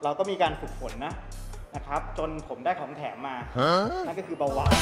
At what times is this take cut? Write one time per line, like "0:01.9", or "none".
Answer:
none